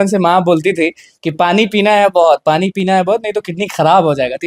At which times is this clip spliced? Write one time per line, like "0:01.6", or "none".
none